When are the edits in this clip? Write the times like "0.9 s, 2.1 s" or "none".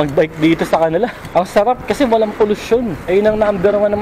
1.2 s, 3.0 s